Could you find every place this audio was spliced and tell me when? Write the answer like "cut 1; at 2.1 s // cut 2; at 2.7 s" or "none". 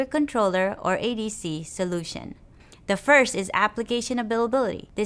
cut 1; at 3.5 s